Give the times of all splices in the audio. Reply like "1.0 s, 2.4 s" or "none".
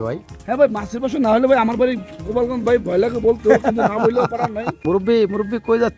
5.0 s